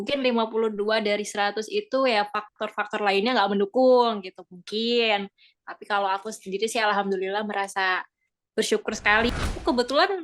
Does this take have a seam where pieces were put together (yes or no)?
yes